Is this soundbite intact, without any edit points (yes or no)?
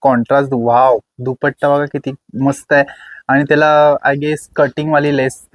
yes